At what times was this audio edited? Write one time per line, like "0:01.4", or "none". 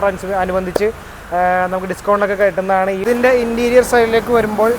0:03.0